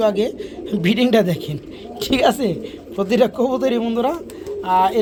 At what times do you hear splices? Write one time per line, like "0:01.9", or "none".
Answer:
none